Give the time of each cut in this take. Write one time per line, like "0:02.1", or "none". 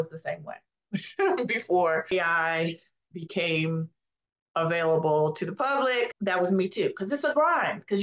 0:06.2

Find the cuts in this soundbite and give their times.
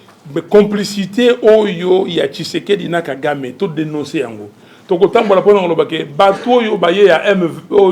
none

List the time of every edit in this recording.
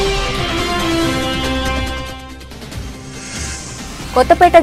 0:01.2

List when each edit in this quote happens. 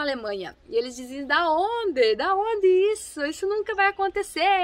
none

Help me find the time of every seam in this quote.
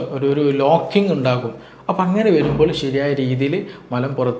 none

